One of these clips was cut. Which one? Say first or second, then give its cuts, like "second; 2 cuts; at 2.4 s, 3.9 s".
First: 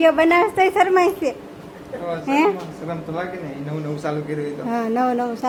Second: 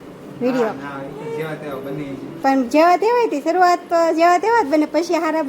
second; 1 cut; at 2.4 s